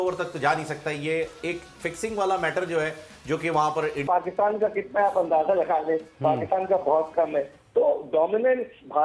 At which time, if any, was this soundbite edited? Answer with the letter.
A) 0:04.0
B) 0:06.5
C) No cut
A